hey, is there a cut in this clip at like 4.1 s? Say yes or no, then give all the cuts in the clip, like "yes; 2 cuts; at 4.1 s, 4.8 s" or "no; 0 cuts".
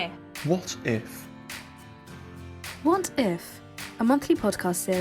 no; 2 cuts; at 1.0 s, 2.8 s